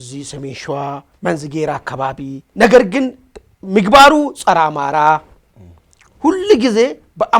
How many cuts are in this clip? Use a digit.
2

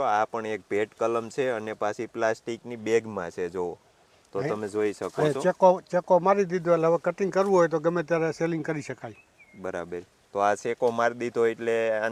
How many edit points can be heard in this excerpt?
0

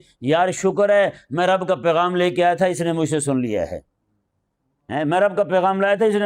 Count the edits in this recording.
0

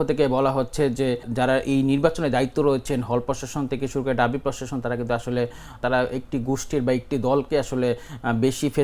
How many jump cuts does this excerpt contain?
2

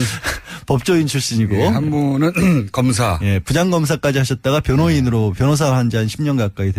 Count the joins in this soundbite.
1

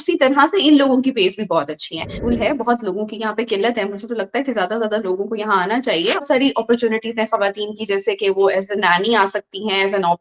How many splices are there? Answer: 2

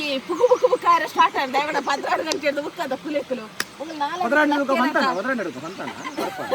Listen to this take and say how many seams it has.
0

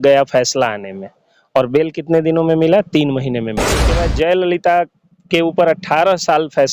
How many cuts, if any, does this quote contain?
1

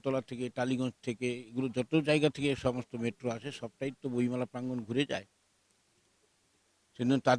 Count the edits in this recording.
0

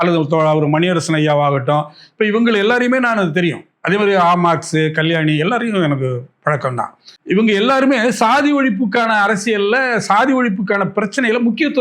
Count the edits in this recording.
1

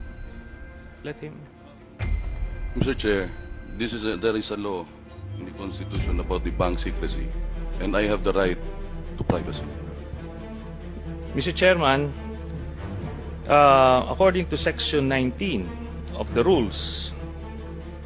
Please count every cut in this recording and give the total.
0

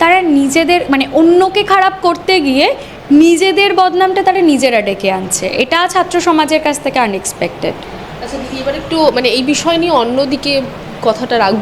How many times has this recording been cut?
0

